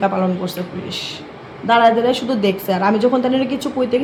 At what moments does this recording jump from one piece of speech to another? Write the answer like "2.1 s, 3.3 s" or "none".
none

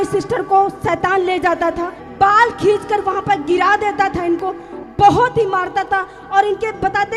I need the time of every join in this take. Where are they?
2.0 s

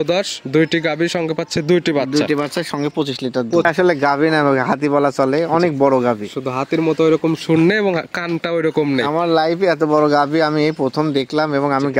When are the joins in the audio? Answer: 3.6 s

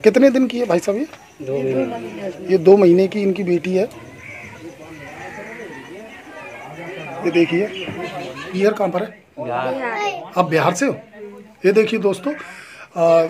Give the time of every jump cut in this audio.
8.5 s

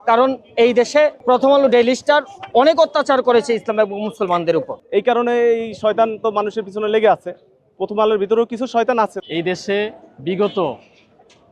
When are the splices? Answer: 1.2 s, 4.8 s, 9.2 s

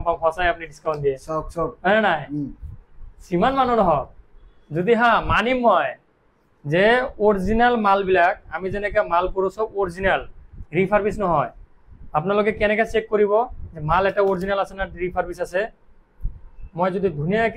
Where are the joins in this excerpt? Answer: none

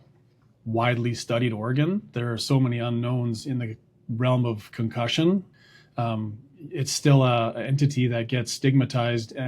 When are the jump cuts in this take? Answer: 2.1 s, 5.6 s

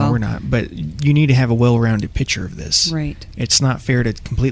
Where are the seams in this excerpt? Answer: none

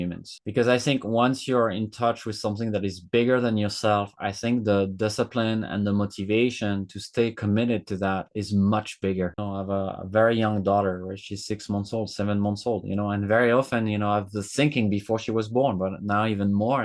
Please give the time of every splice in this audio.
9.4 s

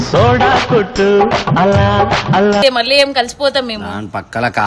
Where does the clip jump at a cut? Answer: 2.6 s

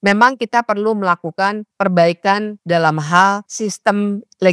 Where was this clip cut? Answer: 1.7 s, 2.5 s, 3.5 s

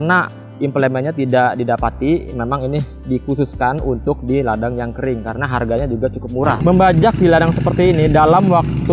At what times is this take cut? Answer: 6.6 s

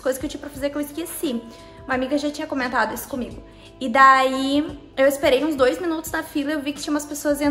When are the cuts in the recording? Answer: none

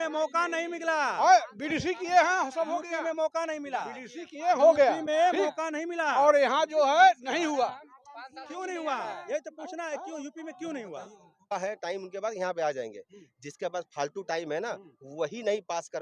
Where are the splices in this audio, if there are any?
11.5 s

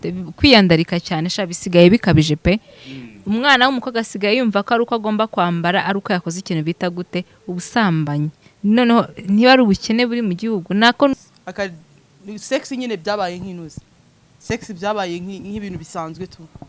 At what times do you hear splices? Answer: 11.1 s

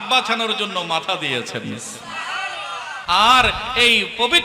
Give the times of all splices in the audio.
2.9 s

